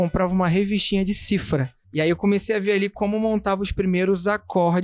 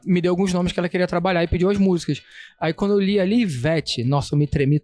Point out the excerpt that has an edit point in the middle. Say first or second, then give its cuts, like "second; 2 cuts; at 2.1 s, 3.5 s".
first; 1 cut; at 1.8 s